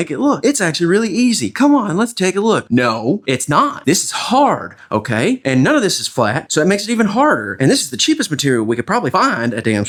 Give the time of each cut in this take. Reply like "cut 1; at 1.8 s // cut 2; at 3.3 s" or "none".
none